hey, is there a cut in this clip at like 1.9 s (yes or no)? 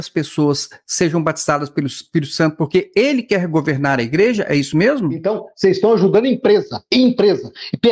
no